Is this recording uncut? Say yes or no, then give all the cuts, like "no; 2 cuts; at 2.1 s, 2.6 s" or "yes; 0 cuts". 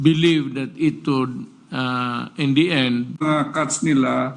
no; 1 cut; at 3.1 s